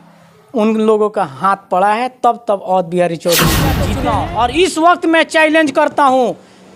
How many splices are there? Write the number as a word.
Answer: one